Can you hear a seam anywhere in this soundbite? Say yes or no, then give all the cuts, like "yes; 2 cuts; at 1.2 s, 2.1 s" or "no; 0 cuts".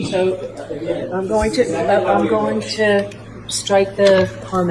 no; 0 cuts